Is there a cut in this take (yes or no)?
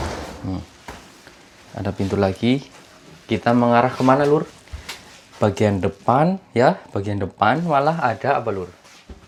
no